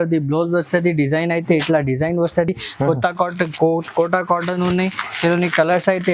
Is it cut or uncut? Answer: uncut